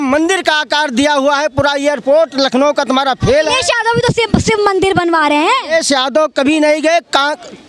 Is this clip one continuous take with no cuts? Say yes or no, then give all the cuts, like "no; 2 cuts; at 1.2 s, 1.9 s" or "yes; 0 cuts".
yes; 0 cuts